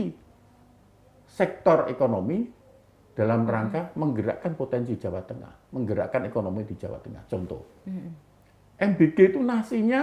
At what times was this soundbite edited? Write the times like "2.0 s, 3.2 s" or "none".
none